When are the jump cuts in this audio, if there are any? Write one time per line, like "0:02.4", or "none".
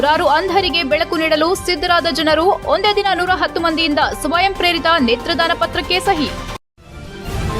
0:06.5

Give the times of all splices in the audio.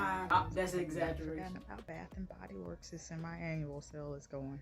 0:01.7

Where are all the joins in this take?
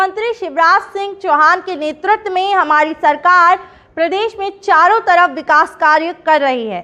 none

